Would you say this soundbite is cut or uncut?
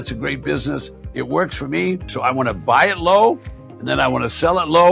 cut